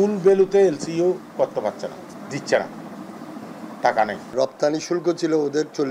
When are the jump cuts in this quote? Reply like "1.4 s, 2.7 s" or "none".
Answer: 2.1 s, 4.3 s